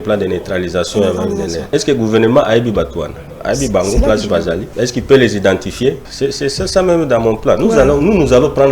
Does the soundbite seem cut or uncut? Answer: cut